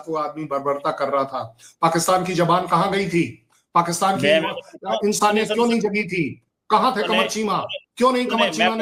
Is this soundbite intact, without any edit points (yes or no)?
yes